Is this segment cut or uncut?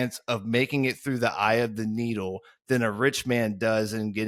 uncut